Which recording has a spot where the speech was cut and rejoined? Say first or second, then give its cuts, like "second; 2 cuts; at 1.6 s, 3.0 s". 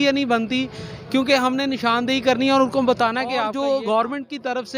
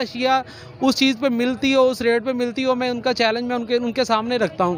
first; 1 cut; at 3.5 s